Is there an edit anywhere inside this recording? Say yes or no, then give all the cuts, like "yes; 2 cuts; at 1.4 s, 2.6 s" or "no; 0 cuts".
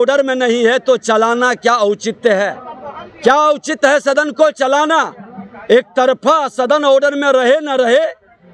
no; 0 cuts